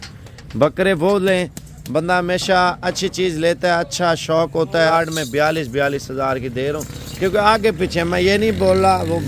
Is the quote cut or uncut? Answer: cut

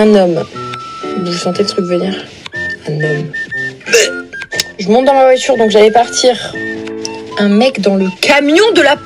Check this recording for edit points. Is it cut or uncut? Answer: cut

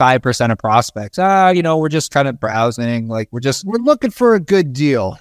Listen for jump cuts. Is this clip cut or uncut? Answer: uncut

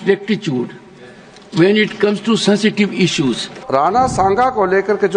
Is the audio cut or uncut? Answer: cut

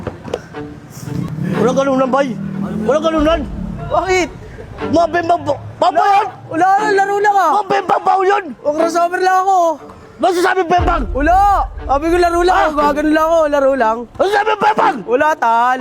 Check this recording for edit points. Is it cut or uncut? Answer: cut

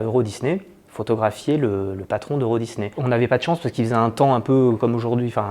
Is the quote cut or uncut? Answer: uncut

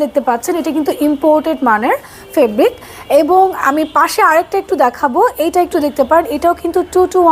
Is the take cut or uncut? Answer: uncut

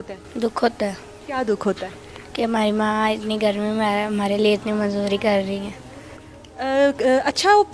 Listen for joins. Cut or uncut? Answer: uncut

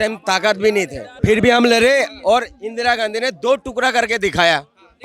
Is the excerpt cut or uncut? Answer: cut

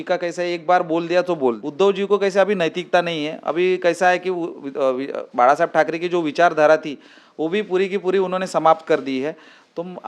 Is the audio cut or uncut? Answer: cut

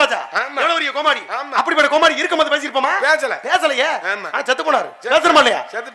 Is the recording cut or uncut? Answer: uncut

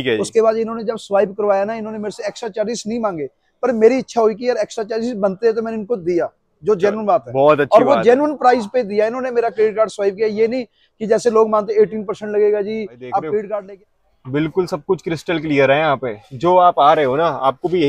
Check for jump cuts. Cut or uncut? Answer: cut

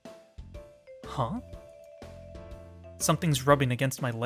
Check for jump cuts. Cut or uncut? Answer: uncut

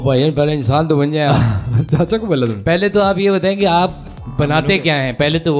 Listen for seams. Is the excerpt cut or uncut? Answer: uncut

